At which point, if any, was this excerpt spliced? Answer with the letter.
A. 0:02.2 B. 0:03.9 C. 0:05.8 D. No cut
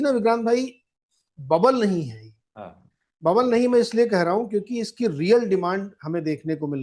D